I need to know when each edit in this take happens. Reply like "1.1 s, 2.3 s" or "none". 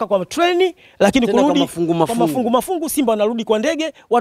none